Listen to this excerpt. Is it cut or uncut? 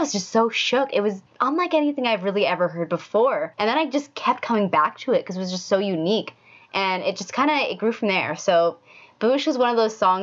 cut